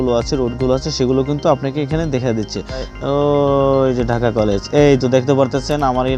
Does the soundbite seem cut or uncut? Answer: cut